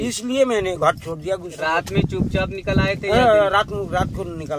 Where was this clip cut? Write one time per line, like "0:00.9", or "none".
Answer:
0:01.6